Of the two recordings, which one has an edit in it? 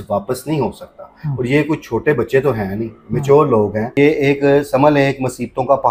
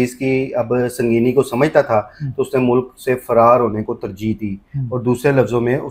first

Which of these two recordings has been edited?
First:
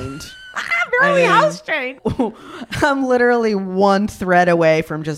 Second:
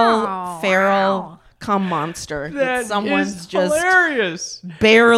first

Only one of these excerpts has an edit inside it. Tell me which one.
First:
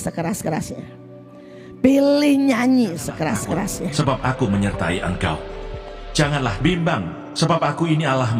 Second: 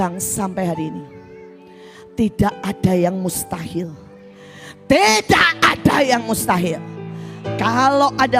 first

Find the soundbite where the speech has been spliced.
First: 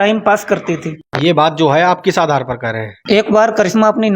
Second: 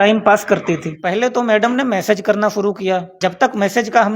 second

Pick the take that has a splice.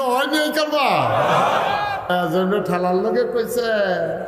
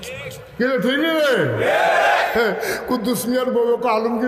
first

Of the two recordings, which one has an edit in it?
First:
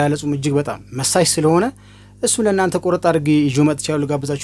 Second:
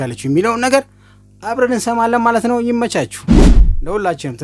second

